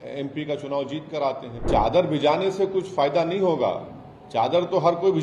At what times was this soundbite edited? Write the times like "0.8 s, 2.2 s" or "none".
1.6 s